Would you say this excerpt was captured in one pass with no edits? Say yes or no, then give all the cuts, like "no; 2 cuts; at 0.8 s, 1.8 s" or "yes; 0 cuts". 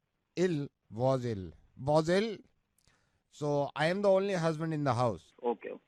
yes; 0 cuts